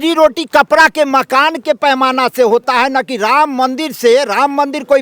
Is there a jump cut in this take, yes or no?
no